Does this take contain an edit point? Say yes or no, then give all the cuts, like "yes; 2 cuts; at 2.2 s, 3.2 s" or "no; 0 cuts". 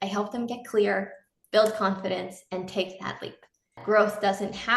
yes; 1 cut; at 3.8 s